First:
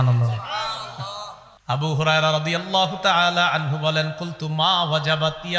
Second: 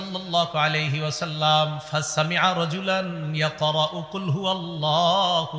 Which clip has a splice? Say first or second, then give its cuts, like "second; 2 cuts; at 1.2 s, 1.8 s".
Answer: first; 1 cut; at 1.5 s